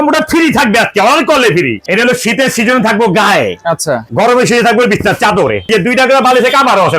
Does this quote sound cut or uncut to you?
cut